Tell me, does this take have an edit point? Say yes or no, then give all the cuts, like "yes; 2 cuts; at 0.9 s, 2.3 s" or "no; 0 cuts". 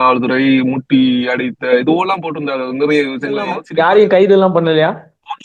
yes; 1 cut; at 3.6 s